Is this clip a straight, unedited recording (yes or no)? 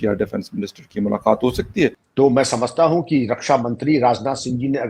no